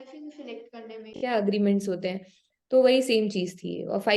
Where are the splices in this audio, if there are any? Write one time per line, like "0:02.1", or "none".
0:01.1